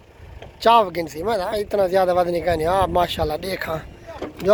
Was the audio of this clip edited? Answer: no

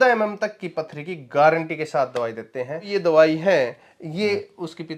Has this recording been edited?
yes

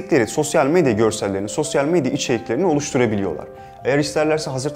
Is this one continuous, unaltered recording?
yes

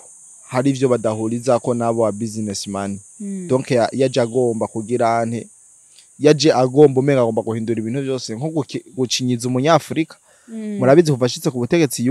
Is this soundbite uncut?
yes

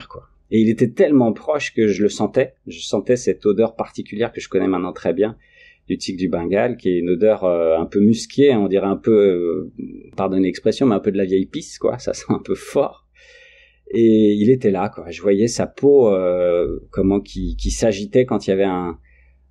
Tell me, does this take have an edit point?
no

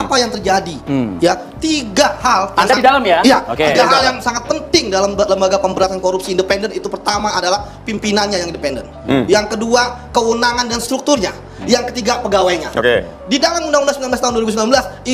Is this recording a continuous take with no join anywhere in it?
yes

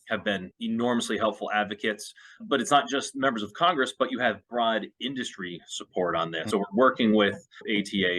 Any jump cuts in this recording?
yes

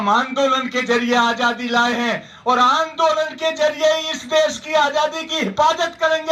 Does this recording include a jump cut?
no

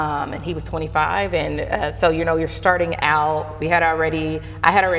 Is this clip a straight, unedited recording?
yes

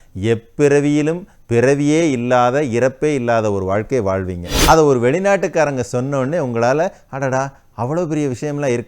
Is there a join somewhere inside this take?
yes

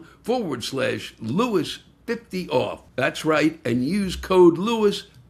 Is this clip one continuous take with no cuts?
yes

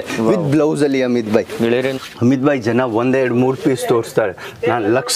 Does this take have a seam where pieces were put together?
yes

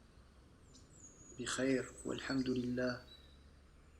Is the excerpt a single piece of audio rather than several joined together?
no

